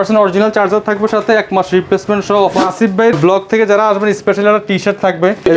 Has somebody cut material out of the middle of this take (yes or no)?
yes